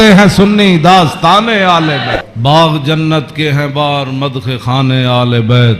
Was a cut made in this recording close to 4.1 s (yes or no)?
no